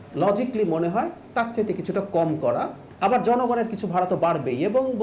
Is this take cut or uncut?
cut